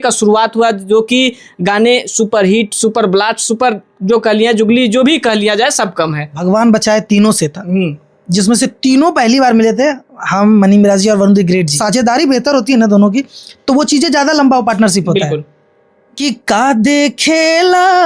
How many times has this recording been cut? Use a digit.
3